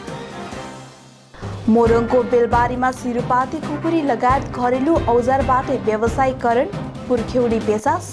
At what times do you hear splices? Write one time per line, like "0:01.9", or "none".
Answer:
0:01.1